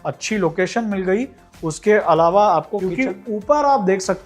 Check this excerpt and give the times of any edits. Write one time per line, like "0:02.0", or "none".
0:02.8

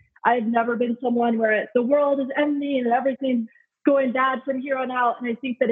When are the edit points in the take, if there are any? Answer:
0:01.7
0:03.5

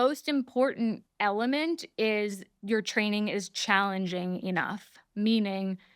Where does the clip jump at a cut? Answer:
0:01.1
0:02.5

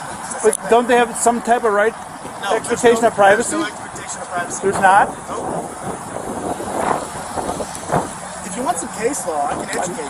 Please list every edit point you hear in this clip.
none

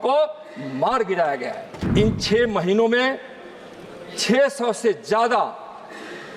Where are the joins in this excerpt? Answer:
0:01.7

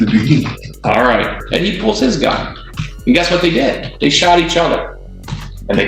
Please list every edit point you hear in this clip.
0:01.4

